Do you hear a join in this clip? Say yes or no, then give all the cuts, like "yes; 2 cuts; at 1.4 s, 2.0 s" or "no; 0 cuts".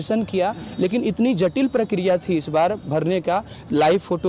no; 0 cuts